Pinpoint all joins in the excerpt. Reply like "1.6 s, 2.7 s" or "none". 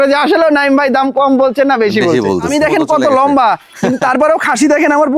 2.5 s